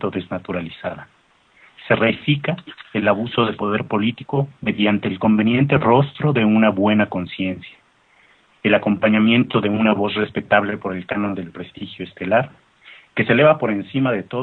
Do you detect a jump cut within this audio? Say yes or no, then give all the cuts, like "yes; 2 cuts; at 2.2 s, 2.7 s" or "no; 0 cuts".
yes; 1 cut; at 12.4 s